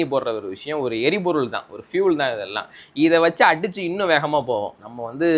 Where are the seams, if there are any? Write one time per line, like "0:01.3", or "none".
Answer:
none